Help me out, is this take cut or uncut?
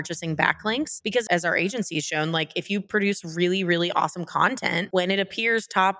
cut